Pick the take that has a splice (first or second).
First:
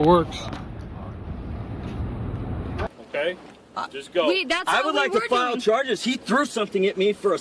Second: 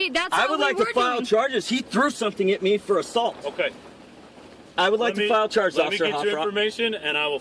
first